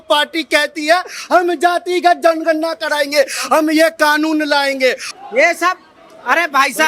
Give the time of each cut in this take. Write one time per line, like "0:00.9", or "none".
0:05.1